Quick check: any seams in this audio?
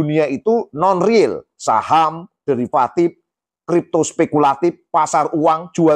no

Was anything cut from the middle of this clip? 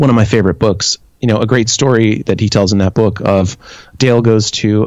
yes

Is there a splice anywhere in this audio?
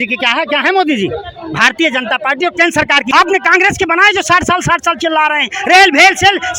yes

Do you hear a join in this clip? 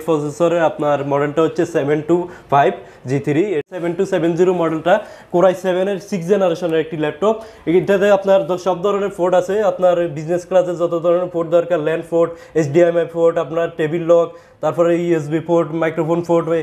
yes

